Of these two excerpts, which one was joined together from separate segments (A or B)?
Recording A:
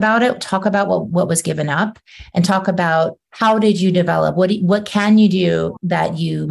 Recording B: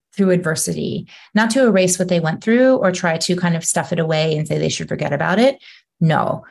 A